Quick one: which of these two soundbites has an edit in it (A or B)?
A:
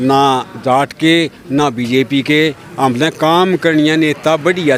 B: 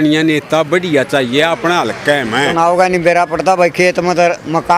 B